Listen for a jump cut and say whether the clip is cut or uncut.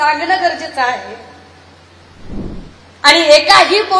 cut